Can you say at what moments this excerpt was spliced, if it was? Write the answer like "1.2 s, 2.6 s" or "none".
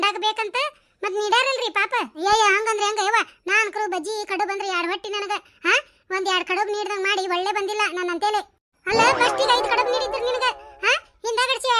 2.1 s